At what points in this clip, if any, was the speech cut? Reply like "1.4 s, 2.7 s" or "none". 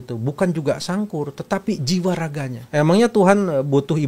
2.5 s